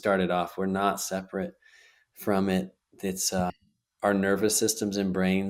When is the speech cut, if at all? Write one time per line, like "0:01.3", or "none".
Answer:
0:03.5

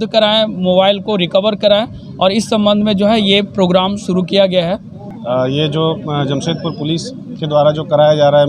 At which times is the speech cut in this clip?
0:05.1

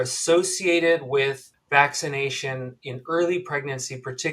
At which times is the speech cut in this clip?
0:01.5

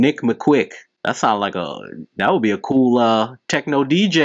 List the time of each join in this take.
none

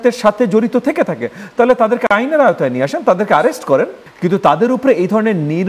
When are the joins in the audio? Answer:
0:04.0

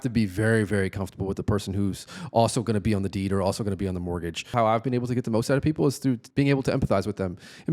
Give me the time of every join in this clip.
0:04.5
0:06.2

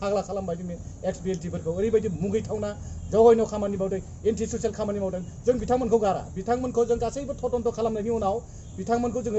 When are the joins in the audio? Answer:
none

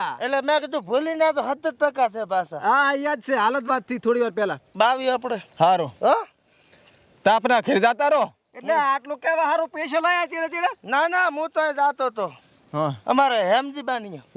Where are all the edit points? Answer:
none

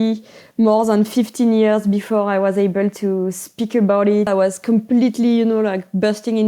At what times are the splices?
0:04.3

